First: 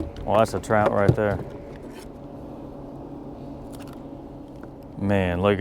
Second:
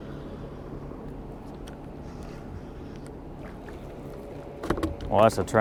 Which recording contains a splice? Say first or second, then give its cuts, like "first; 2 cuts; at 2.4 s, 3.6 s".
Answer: first; 2 cuts; at 1.9 s, 4.5 s